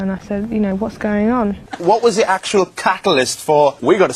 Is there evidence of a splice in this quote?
yes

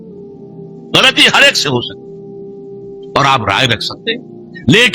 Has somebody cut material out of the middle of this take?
yes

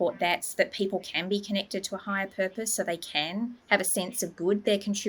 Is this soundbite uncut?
yes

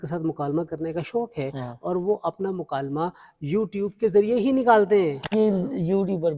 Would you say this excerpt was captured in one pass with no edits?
no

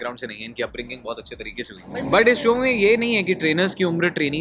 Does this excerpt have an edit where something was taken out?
yes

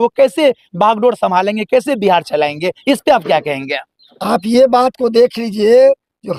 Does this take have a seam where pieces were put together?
no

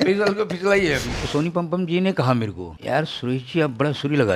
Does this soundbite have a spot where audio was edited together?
yes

